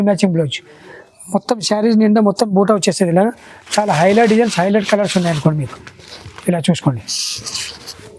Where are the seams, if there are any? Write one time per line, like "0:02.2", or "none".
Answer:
none

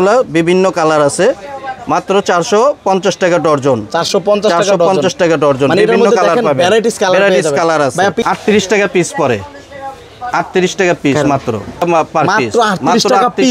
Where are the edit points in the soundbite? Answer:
none

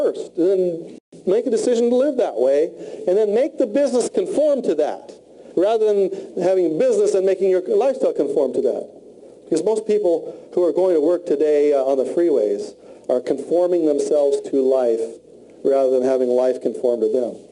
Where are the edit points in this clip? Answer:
0:06.2

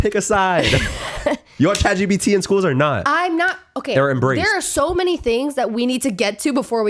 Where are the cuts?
none

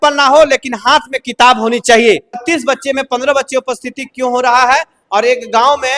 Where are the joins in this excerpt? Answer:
0:02.4

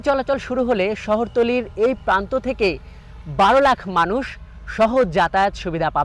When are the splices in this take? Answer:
none

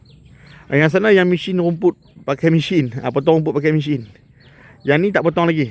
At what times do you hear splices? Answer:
none

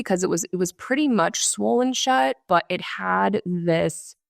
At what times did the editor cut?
0:02.4

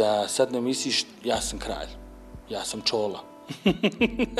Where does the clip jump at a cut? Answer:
none

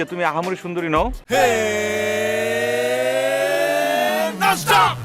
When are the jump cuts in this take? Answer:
0:01.2

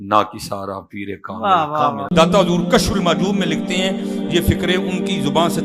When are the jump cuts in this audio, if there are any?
0:02.0

